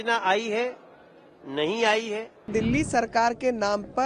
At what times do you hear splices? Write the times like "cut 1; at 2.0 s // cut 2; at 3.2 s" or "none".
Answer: cut 1; at 2.5 s